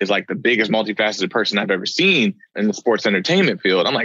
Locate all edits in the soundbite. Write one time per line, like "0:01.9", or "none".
0:02.5